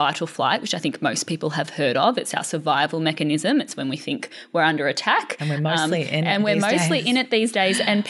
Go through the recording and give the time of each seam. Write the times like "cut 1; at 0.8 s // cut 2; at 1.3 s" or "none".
none